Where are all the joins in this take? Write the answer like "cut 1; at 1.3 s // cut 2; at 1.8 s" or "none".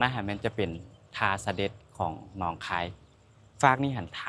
none